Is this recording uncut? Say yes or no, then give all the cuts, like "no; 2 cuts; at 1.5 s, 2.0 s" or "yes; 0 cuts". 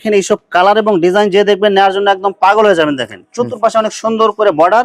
yes; 0 cuts